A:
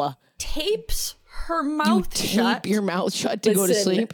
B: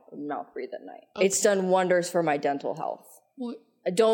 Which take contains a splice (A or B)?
B